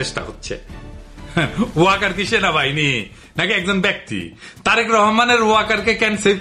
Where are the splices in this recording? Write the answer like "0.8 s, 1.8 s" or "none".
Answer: none